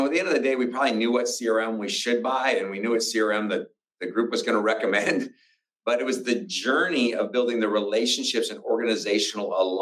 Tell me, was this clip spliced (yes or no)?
no